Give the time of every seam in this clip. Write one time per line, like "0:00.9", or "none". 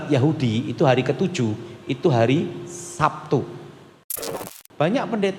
0:04.4

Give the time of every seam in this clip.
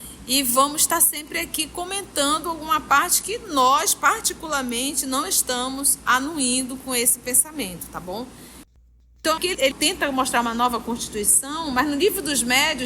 0:08.8

